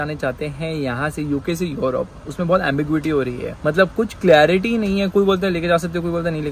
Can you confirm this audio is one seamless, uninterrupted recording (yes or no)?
yes